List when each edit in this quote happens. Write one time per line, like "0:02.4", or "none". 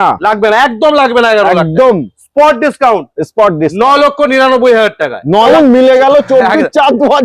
0:05.5